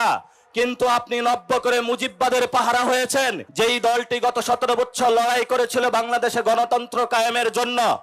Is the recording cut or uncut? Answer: cut